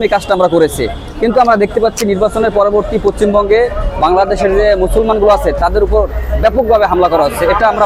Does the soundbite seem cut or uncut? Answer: uncut